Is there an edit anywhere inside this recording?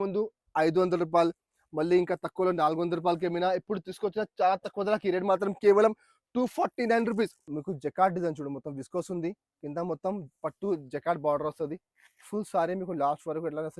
yes; 1 cut; at 7.5 s

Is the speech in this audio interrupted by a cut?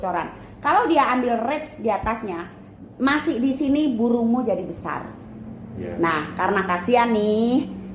no; 0 cuts

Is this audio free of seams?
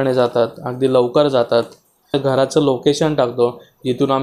no; 1 cut; at 2.1 s

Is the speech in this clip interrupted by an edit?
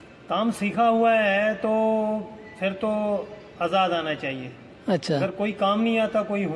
no; 0 cuts

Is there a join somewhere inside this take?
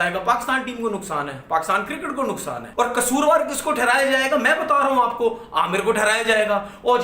yes; 1 cut; at 2.6 s

